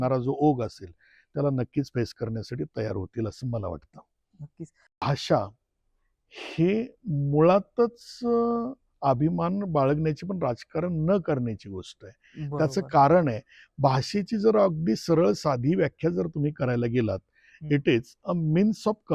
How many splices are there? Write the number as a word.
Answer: one